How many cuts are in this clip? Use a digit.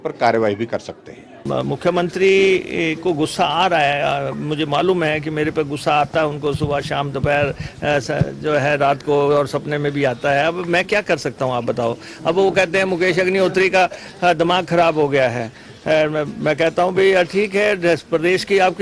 1